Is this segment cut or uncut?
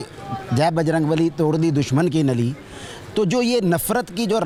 uncut